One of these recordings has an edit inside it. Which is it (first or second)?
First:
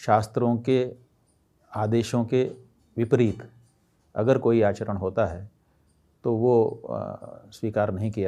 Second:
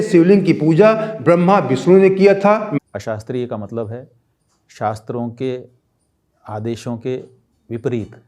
second